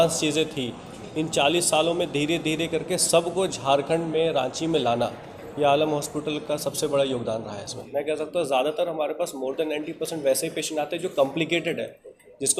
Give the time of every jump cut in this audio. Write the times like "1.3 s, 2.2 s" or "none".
7.7 s